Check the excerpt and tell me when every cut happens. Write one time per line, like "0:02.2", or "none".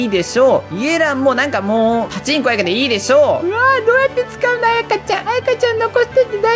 0:02.2
0:03.4